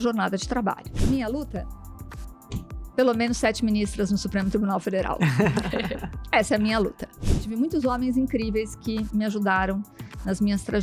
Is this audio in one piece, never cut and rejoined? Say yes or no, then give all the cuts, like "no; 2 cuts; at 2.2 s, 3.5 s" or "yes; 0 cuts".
no; 2 cuts; at 0.9 s, 7.4 s